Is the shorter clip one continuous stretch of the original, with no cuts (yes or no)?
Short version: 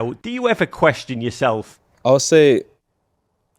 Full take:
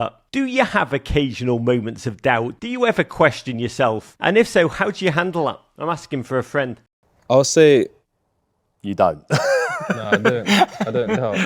no